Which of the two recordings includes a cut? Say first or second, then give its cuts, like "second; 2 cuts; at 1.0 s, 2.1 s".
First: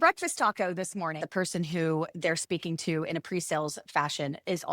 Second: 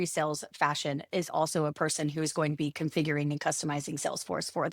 first; 1 cut; at 1.1 s